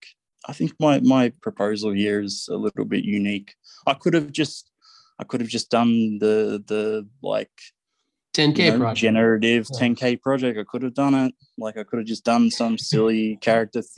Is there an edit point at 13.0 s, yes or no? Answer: no